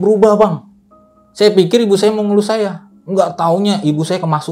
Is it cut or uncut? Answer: uncut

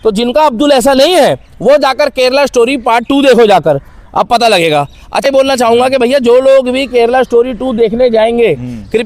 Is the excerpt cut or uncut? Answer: cut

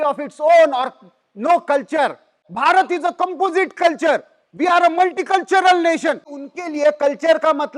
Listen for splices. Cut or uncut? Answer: cut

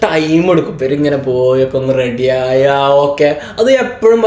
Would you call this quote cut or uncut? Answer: uncut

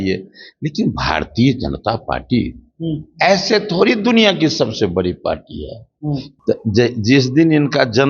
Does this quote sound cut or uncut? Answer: cut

